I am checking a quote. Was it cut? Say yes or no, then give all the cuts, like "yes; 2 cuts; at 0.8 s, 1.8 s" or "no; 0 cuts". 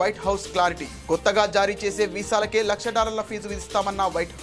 no; 0 cuts